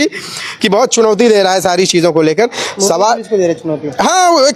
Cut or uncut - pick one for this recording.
uncut